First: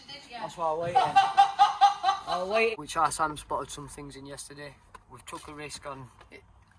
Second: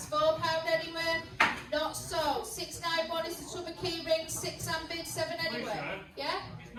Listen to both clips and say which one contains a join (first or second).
first